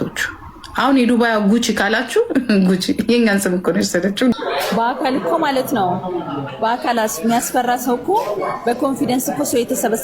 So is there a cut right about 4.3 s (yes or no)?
yes